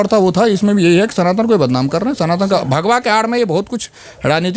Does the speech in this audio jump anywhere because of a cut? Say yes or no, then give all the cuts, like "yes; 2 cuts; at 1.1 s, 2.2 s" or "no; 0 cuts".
no; 0 cuts